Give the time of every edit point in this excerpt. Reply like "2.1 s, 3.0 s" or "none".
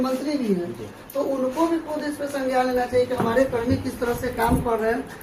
none